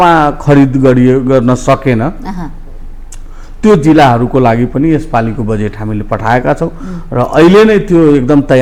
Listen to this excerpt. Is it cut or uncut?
uncut